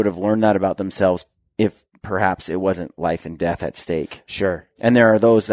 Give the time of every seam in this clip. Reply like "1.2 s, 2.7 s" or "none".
none